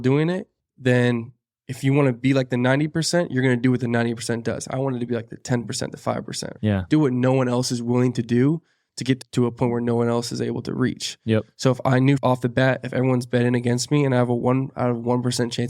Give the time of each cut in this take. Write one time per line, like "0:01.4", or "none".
0:06.5
0:09.2